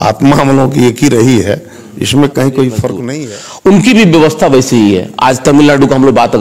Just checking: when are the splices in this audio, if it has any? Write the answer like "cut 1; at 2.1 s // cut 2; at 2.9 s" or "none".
cut 1; at 3.1 s